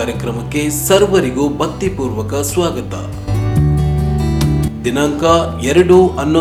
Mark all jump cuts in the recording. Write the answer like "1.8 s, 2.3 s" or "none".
none